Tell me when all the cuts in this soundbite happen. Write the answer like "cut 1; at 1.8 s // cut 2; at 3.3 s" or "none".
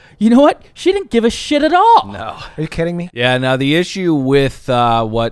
cut 1; at 3.1 s

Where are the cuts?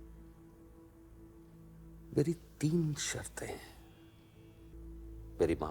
cut 1; at 4.7 s

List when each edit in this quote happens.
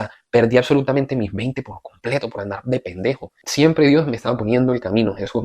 cut 1; at 3.4 s

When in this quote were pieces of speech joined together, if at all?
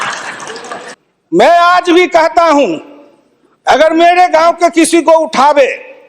cut 1; at 1.0 s

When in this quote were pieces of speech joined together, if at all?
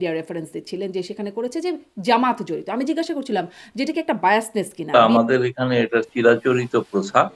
cut 1; at 4.9 s

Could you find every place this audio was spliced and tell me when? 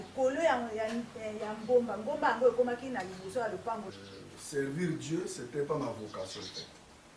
cut 1; at 3.9 s

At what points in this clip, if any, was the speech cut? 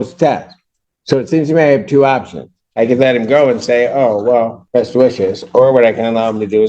cut 1; at 4.6 s

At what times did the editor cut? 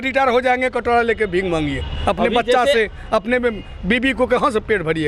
none

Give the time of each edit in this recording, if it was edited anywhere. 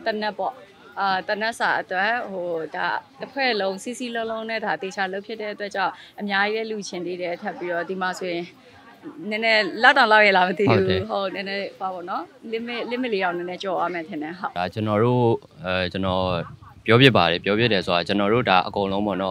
cut 1; at 14.5 s

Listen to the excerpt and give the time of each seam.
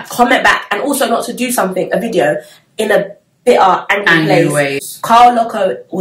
cut 1; at 4.8 s

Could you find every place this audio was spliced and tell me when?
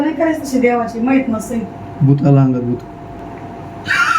cut 1; at 3.2 s

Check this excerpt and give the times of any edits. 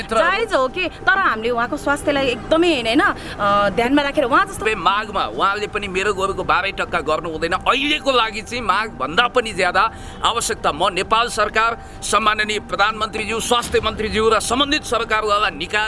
cut 1; at 4.6 s

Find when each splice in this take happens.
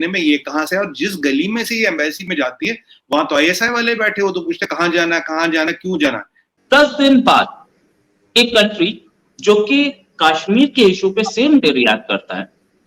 cut 1; at 6.5 s

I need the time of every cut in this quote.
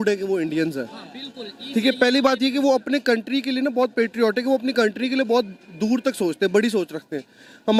none

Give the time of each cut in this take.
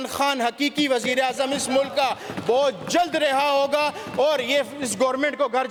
none

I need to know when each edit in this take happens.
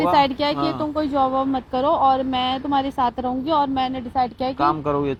none

